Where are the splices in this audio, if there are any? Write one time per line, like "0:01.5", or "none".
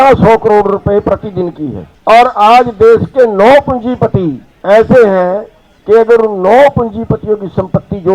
0:01.9
0:04.5